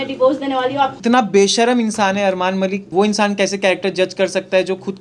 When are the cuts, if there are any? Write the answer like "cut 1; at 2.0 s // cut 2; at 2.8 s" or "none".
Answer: cut 1; at 1.0 s // cut 2; at 2.9 s

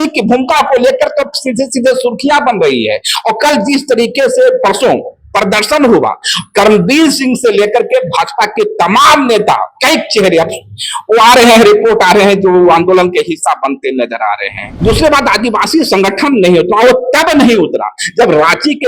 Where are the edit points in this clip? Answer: cut 1; at 14.7 s

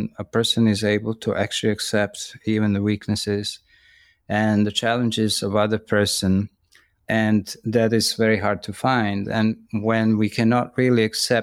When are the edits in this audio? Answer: none

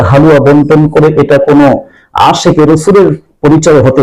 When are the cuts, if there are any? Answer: none

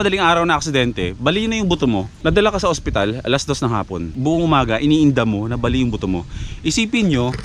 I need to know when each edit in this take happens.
cut 1; at 2.1 s // cut 2; at 4.1 s

